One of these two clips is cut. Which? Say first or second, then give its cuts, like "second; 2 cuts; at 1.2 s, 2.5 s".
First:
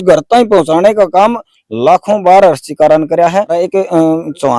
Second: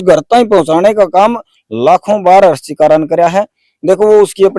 first; 1 cut; at 3.6 s